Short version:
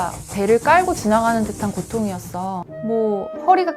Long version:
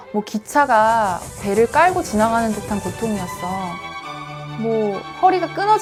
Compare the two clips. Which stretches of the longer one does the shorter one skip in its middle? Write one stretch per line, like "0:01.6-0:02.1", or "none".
0:03.8-0:04.5